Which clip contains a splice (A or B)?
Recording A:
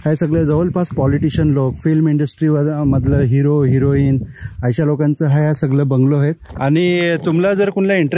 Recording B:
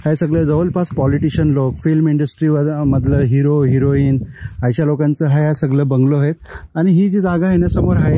A